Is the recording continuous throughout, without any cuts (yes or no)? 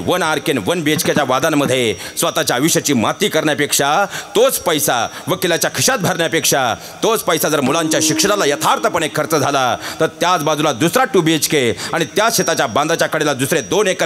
yes